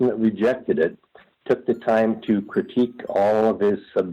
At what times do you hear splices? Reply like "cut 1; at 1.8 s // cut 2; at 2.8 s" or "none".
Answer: cut 1; at 1.3 s